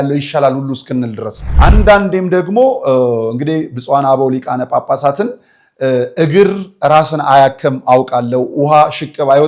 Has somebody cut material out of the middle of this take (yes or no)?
yes